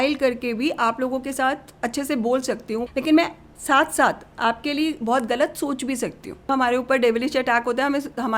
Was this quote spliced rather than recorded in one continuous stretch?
yes; 3 cuts; at 1.7 s, 2.9 s, 6.5 s

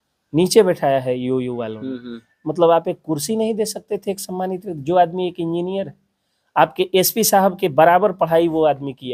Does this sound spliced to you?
no; 0 cuts

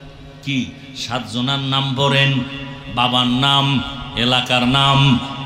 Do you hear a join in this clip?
no; 0 cuts

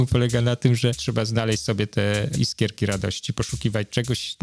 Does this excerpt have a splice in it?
yes; 2 cuts; at 1.0 s, 2.3 s

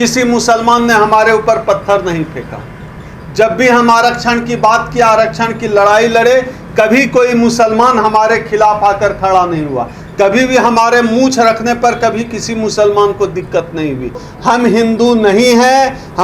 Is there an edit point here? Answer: yes; 1 cut; at 14.3 s

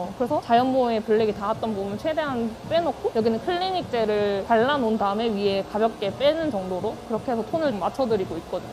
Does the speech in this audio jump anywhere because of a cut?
yes; 1 cut; at 7.7 s

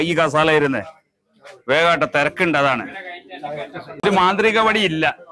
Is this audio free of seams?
no; 1 cut; at 4.0 s

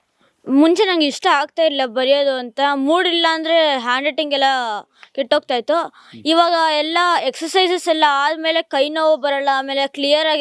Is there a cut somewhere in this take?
no; 0 cuts

